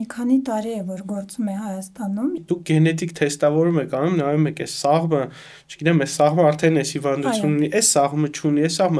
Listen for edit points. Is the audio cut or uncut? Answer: cut